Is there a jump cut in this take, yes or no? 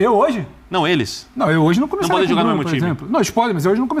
no